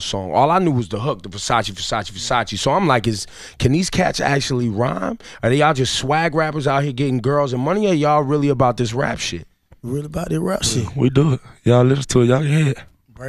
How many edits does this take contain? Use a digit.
0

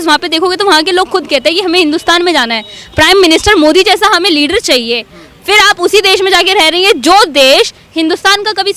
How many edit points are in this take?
0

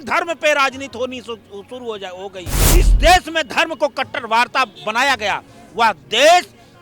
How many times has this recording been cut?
1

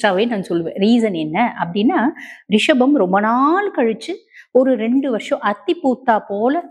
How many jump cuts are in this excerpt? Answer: 0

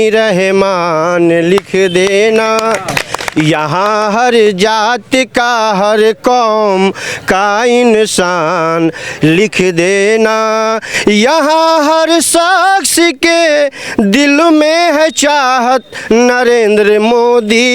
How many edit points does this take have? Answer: 0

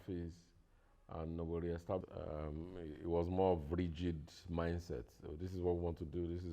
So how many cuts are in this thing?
1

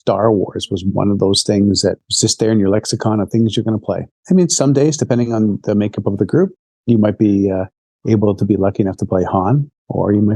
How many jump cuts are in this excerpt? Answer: 2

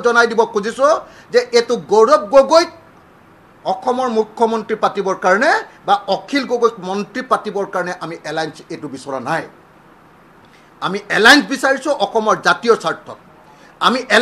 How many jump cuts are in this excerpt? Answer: 0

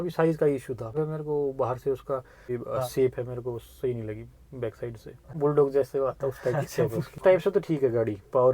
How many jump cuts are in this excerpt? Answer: 4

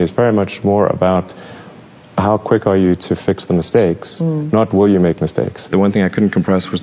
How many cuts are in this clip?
1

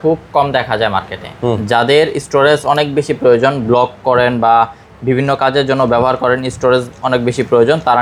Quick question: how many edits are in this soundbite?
0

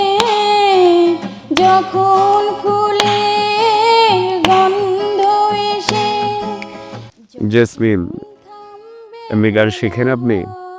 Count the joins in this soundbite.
1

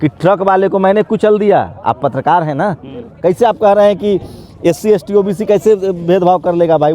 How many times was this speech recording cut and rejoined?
1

